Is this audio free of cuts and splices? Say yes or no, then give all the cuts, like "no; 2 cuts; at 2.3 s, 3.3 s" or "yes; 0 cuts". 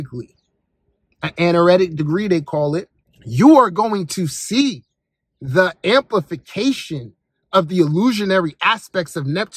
yes; 0 cuts